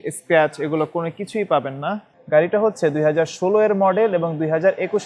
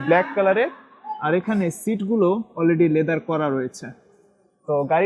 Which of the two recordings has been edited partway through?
first; 1 cut; at 2.1 s

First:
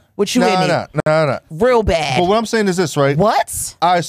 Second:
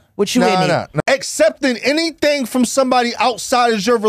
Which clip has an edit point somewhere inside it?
second; 1 cut; at 0.9 s

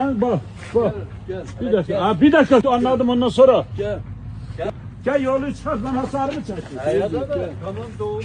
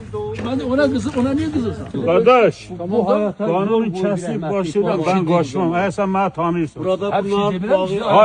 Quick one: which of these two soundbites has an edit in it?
second; 1 cut; at 1.9 s

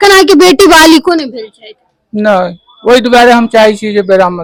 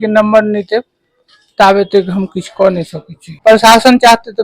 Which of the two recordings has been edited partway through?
second; 1 cut; at 3.4 s

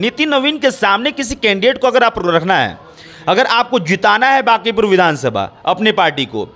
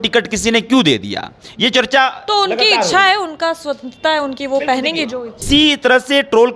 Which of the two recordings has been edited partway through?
second; 1 cut; at 5.4 s

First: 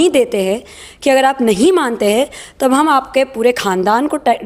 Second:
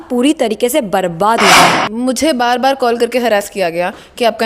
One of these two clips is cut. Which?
second; 1 cut; at 1.8 s

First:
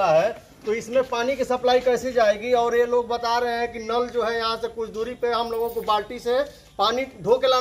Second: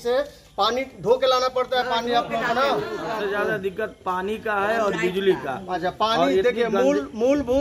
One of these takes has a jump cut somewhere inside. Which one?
second; 1 cut; at 3.1 s

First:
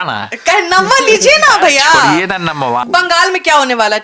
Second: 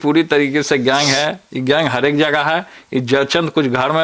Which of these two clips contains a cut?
first; 1 cut; at 2.8 s

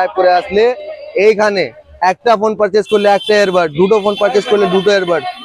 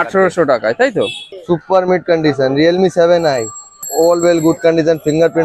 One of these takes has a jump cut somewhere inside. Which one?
second; 2 cuts; at 1.2 s, 3.9 s

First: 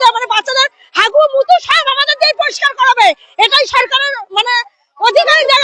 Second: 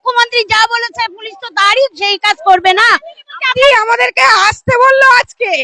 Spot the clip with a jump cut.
second; 1 cut; at 3.6 s

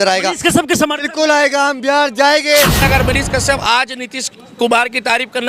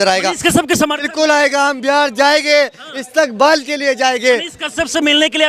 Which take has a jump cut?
first; 1 cut; at 2.8 s

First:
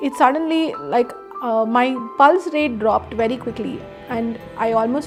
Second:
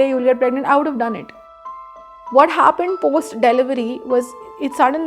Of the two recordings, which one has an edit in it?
second; 1 cut; at 1.8 s

